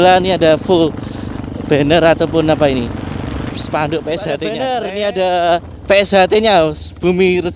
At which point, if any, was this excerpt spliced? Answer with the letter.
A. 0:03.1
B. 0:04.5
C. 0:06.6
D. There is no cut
B